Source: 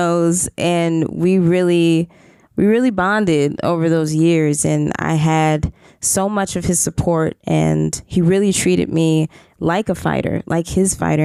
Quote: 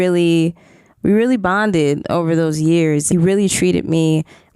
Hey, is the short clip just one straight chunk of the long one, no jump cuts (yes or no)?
no